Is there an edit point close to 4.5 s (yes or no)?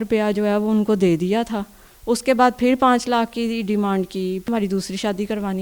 yes